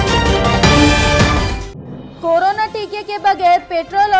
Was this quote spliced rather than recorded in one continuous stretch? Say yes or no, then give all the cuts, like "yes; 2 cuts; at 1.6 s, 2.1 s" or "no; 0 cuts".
yes; 1 cut; at 1.6 s